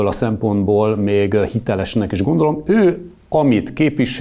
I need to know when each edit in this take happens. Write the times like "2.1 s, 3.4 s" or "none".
none